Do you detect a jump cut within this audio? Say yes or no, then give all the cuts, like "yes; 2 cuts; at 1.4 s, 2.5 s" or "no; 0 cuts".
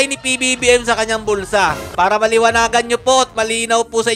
yes; 1 cut; at 1.9 s